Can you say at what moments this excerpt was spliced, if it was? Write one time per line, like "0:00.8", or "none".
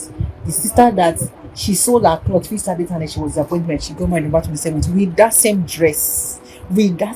none